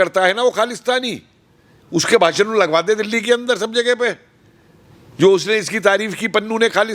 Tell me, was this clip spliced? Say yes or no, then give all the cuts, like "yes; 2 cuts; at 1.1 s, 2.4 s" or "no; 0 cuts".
no; 0 cuts